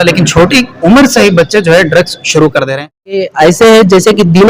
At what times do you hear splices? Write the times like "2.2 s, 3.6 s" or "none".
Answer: 3.3 s